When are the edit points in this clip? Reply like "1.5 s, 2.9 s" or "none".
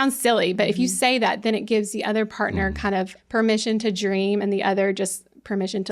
3.2 s